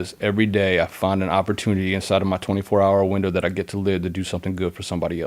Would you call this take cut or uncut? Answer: uncut